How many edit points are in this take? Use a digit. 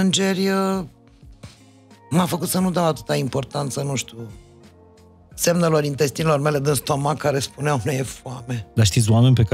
1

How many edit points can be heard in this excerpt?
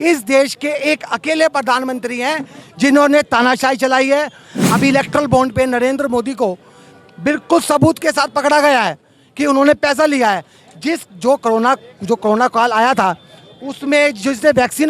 1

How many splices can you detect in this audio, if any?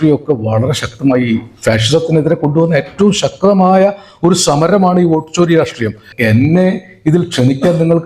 1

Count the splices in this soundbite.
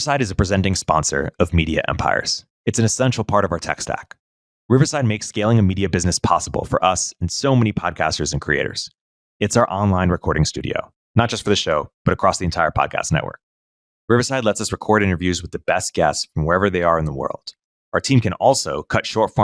0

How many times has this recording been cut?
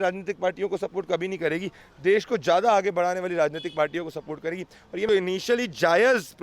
1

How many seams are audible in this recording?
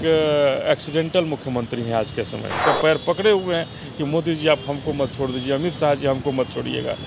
1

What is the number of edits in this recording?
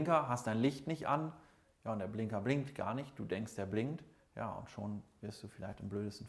0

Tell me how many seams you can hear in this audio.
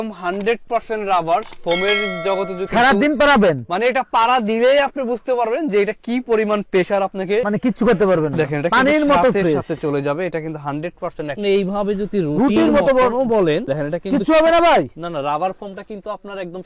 2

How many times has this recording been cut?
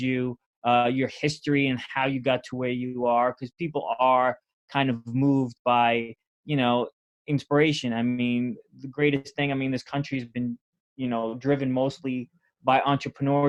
0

